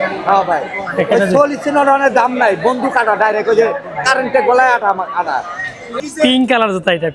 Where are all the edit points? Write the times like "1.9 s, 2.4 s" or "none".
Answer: 6.0 s